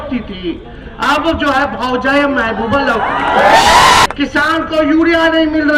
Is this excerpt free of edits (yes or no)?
no